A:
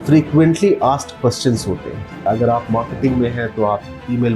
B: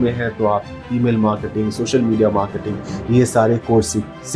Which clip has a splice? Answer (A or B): A